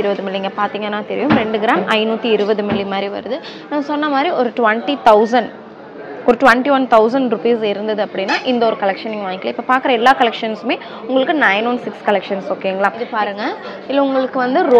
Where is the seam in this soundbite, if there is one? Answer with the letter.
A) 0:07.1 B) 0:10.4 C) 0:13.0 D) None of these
C